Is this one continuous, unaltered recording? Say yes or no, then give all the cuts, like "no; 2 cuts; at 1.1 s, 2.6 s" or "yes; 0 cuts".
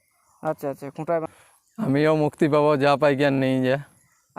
no; 1 cut; at 1.3 s